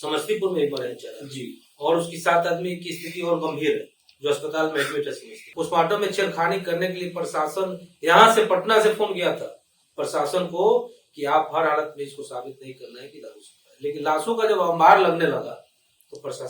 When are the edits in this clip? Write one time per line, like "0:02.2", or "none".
0:05.4